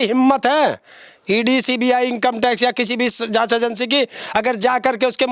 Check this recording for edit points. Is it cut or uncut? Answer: uncut